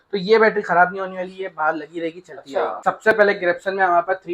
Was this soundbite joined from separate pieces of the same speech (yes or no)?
yes